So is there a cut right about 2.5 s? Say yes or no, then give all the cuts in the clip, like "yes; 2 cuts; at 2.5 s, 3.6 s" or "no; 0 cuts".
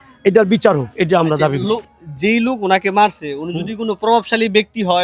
no; 0 cuts